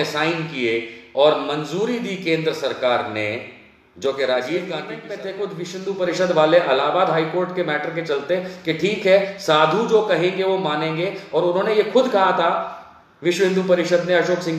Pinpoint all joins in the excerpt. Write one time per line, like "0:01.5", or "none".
0:05.1